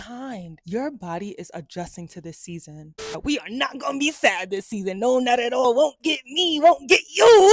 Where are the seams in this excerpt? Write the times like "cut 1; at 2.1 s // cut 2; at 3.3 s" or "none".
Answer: cut 1; at 3.1 s // cut 2; at 5.6 s